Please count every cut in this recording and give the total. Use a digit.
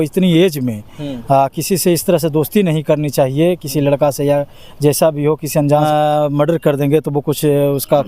1